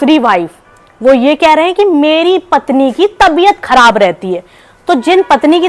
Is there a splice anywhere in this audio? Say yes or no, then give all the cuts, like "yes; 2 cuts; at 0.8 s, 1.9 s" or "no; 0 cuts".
no; 0 cuts